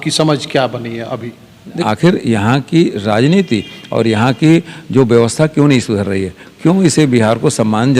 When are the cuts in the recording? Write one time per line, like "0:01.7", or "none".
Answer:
0:01.8